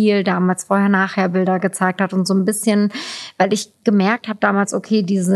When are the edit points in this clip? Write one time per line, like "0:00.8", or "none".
none